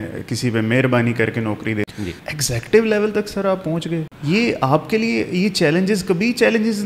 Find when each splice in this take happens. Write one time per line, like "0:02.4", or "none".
0:01.9
0:04.1